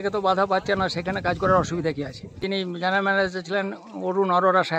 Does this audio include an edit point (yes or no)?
yes